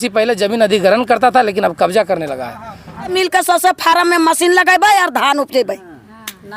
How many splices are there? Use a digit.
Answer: 1